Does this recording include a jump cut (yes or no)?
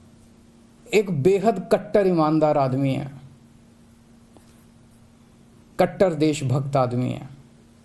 yes